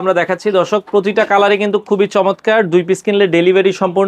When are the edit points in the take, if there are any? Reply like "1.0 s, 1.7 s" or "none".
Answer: none